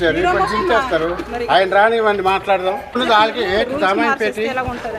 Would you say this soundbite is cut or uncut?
cut